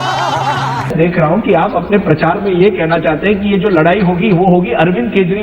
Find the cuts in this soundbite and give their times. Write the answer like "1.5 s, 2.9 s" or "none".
0.9 s